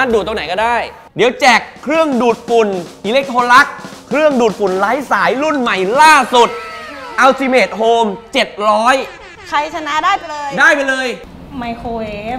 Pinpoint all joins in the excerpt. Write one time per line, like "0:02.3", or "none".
0:01.0
0:11.2